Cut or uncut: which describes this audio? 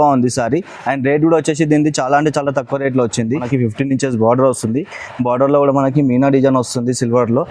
cut